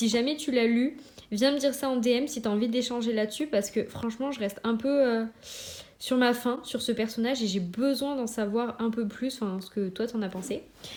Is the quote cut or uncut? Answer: uncut